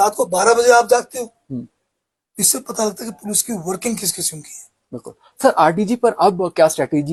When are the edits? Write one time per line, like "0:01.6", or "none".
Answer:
none

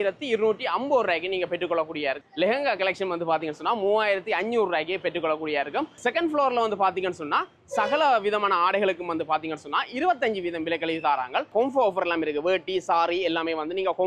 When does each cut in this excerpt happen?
0:02.2
0:05.9
0:11.5

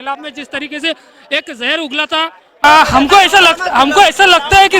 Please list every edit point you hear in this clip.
0:02.6

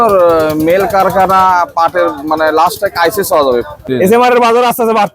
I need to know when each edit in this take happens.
0:03.8

